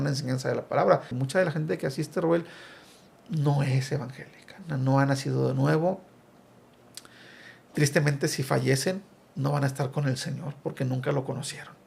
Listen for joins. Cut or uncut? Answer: cut